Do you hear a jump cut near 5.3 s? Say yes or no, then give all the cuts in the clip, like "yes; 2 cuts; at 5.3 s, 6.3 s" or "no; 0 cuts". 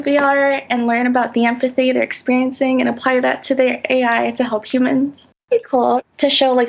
yes; 1 cut; at 5.3 s